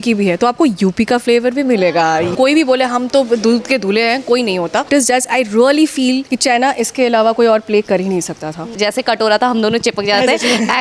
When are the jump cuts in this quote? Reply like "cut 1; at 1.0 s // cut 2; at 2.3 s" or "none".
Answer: cut 1; at 2.3 s // cut 2; at 4.9 s // cut 3; at 6.3 s // cut 4; at 8.7 s